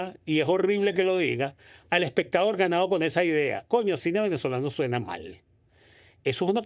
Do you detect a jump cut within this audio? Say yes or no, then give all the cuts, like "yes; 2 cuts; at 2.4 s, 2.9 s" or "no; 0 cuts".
no; 0 cuts